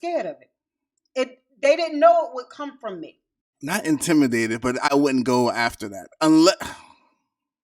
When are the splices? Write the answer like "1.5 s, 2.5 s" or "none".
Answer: 3.5 s